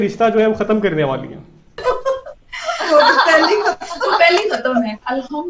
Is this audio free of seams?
no; 1 cut; at 1.8 s

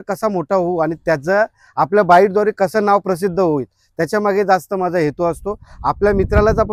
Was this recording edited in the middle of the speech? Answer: no; 0 cuts

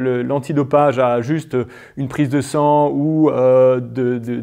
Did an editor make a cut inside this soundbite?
no; 0 cuts

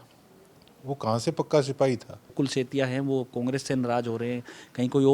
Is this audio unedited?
no; 1 cut; at 2.3 s

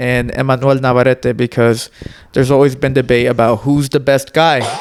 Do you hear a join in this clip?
no; 0 cuts

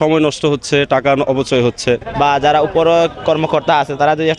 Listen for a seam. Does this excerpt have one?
yes; 1 cut; at 2.1 s

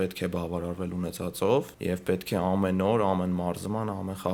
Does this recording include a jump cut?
no; 0 cuts

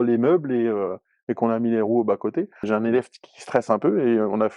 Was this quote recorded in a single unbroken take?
no; 1 cut; at 2.6 s

